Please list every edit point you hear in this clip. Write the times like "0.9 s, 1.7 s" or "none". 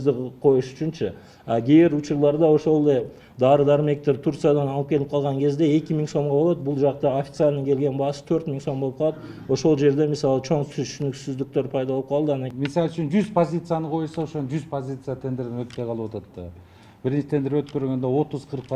12.5 s